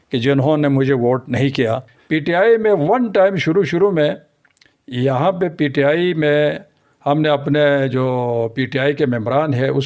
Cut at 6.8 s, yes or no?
no